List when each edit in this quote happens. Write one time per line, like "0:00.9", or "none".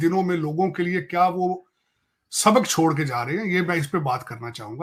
none